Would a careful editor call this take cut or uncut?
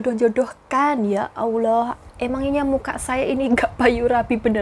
uncut